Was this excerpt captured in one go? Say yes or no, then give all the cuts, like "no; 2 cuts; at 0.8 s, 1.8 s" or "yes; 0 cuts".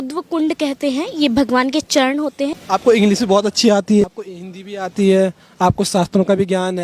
no; 2 cuts; at 2.6 s, 4.0 s